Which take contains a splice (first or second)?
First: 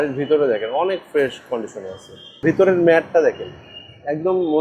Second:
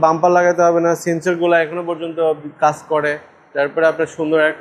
first